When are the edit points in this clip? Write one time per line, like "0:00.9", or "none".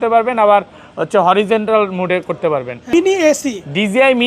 0:02.9